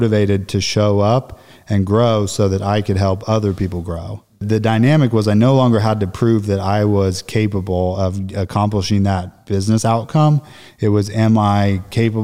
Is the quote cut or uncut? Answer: cut